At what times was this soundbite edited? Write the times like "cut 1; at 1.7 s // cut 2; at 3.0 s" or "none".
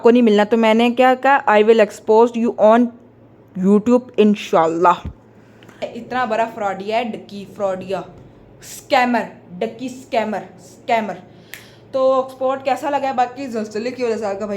cut 1; at 5.9 s